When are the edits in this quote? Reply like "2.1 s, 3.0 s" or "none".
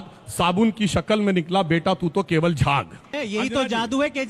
3.1 s

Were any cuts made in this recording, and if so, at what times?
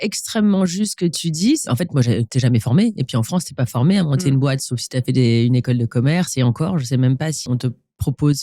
1.7 s, 7.5 s

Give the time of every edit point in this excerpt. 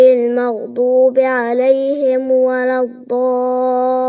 none

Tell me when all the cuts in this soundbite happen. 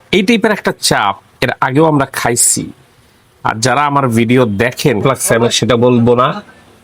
5.0 s

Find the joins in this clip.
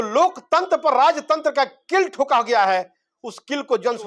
none

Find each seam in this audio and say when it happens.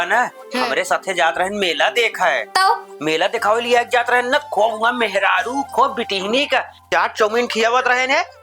7.0 s

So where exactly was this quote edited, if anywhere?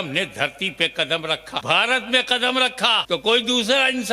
1.6 s, 3.0 s

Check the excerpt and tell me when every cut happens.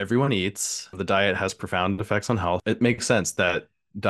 0.9 s, 2.6 s

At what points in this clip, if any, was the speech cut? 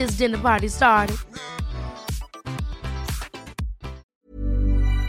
4.1 s

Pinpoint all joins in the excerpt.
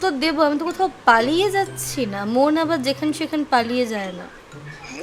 none

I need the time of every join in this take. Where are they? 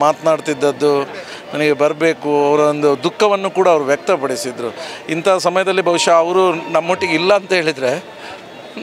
none

